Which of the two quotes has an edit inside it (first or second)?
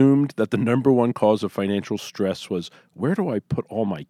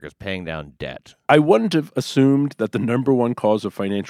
second